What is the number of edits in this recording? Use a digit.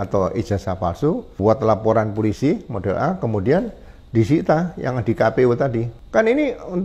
2